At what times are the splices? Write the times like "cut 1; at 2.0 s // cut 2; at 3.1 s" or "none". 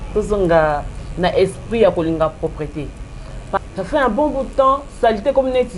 cut 1; at 3.6 s